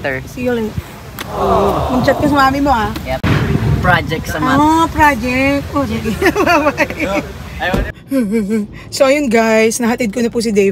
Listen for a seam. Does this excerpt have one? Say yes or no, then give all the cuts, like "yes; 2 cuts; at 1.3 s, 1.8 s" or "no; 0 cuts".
yes; 1 cut; at 3.2 s